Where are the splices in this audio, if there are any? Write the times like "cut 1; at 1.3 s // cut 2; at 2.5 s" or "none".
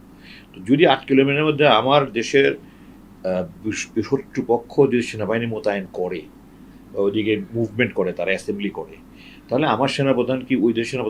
none